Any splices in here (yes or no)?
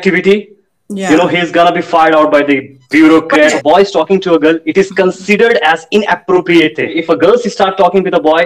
yes